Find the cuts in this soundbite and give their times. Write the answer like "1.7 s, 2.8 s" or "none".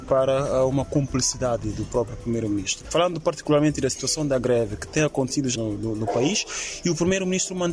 none

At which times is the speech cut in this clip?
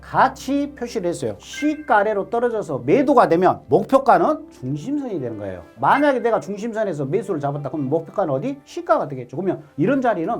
1.4 s, 5.7 s

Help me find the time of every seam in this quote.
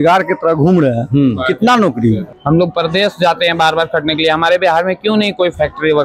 2.2 s

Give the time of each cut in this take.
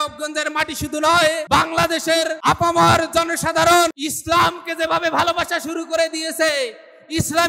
1.4 s, 2.4 s, 4.1 s

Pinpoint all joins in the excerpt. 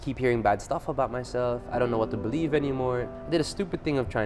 3.1 s

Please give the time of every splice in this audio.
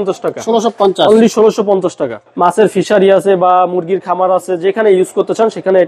2.2 s

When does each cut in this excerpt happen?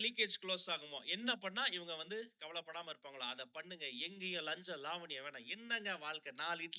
none

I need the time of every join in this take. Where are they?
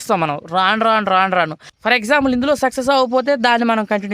1.7 s

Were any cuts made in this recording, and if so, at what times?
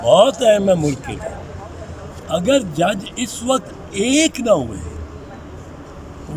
none

